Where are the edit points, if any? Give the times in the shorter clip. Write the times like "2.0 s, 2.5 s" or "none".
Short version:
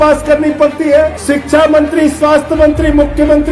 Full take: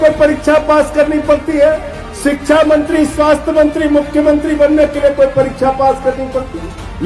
1.2 s